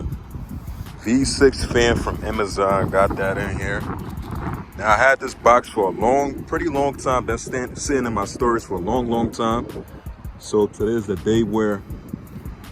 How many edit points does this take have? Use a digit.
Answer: 0